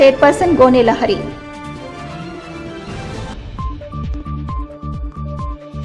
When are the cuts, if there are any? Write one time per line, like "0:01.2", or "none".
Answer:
none